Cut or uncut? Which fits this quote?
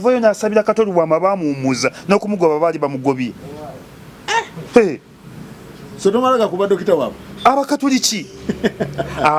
uncut